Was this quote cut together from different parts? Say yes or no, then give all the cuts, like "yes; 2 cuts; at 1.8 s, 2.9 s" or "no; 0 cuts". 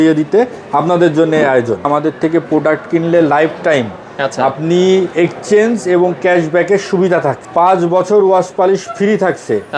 yes; 2 cuts; at 1.9 s, 7.4 s